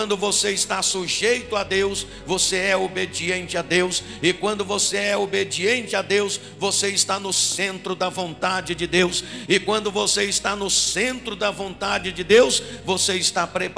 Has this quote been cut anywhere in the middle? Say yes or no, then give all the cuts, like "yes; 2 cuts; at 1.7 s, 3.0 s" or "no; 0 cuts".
no; 0 cuts